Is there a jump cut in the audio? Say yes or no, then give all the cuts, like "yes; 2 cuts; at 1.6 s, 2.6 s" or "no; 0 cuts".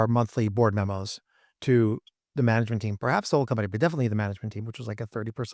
no; 0 cuts